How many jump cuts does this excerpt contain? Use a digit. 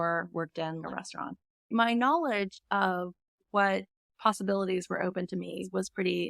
1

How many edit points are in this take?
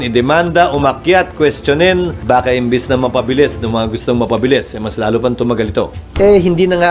2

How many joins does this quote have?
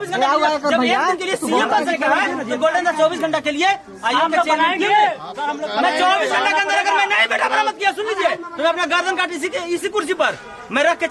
0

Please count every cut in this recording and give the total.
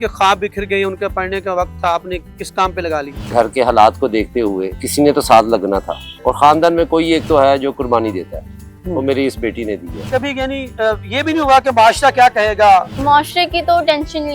3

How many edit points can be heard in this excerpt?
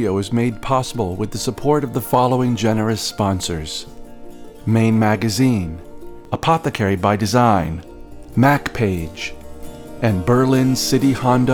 0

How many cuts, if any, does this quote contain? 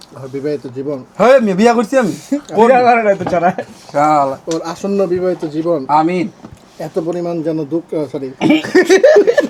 0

